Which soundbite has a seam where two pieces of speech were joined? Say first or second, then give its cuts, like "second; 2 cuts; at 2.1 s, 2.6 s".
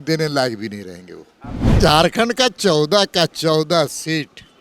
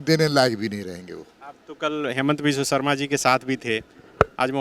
first; 1 cut; at 1.8 s